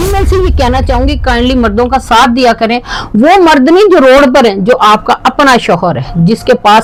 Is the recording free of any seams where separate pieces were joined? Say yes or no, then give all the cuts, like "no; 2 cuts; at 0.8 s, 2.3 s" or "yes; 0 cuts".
yes; 0 cuts